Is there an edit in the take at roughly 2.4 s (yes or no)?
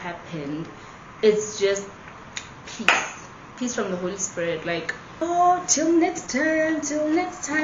no